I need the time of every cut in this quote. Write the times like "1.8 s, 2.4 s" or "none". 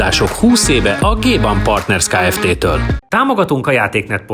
3.0 s